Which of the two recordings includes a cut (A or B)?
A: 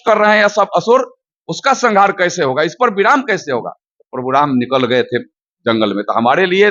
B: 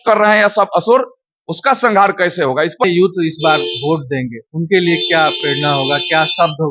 B